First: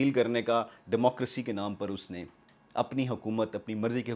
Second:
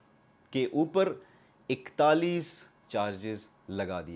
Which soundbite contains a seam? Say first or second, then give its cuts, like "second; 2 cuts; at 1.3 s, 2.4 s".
second; 1 cut; at 2.8 s